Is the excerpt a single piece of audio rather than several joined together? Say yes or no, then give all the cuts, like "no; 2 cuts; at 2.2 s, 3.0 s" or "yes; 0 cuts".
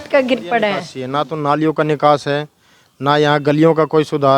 no; 1 cut; at 1.0 s